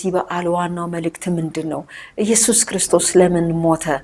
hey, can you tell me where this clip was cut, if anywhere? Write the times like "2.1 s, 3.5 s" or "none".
none

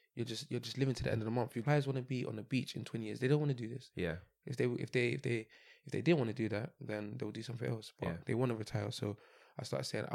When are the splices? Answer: 1.6 s

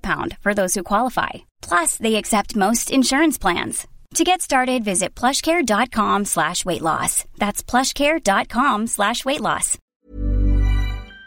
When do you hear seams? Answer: 10.1 s

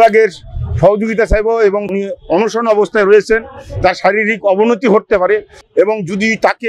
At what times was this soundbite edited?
1.9 s, 5.6 s

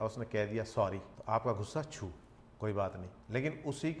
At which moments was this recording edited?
1.1 s, 3.1 s

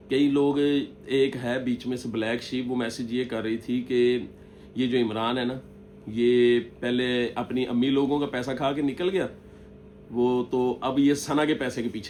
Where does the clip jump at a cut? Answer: none

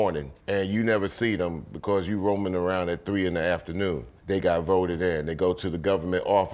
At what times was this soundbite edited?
none

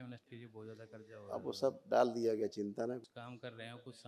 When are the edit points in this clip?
3.0 s

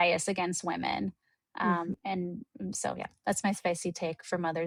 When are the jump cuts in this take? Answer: none

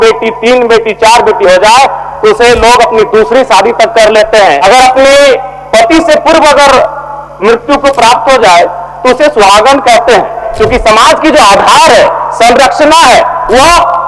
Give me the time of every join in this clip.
4.6 s, 10.5 s

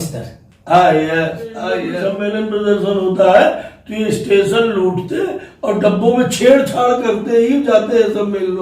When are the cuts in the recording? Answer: 1.9 s

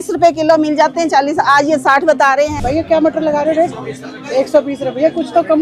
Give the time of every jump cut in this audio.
2.5 s

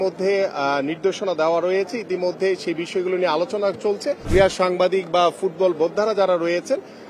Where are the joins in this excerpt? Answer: 4.2 s

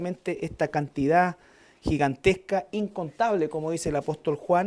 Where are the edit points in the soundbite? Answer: 1.9 s

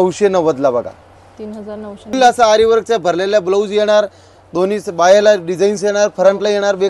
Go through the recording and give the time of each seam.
2.1 s

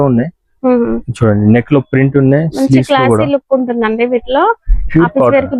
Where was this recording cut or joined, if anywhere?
none

